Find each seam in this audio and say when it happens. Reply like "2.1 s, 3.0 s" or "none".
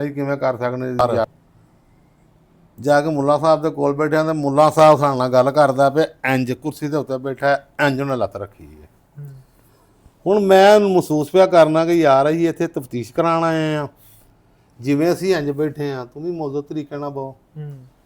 1.0 s